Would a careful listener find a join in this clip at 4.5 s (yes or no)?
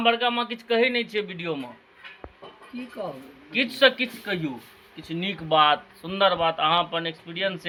no